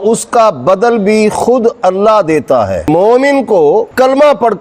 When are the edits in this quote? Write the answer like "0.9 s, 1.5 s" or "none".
2.9 s